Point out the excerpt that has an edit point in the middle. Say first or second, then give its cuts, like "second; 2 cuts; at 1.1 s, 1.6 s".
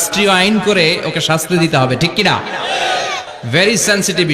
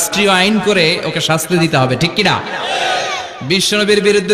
first; 1 cut; at 3.3 s